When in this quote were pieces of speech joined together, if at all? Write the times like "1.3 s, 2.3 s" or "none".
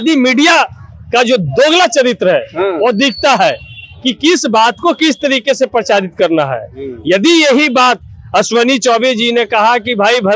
none

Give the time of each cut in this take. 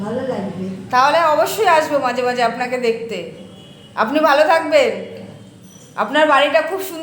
none

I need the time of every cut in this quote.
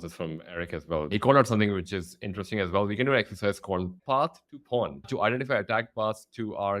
1.1 s, 3.9 s, 5.0 s

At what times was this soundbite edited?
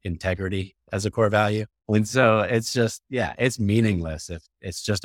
1.7 s

